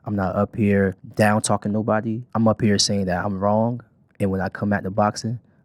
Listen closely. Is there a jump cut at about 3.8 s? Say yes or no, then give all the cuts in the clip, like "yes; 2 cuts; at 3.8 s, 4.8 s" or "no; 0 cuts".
no; 2 cuts; at 1.0 s, 2.2 s